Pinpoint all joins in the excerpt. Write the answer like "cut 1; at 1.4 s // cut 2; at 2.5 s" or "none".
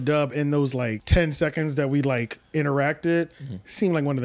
cut 1; at 1.0 s